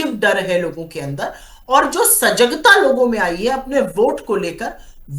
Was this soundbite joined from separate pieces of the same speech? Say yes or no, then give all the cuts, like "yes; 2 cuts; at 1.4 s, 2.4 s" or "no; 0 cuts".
no; 0 cuts